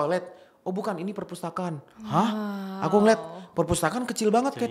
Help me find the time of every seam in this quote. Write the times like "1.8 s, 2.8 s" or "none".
none